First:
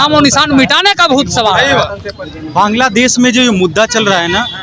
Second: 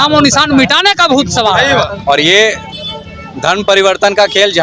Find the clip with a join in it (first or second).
second